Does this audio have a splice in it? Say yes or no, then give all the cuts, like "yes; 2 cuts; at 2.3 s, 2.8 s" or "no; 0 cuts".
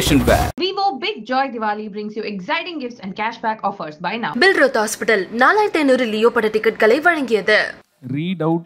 yes; 1 cut; at 7.8 s